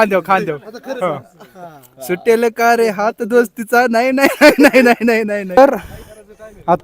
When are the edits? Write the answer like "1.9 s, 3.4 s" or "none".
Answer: 5.5 s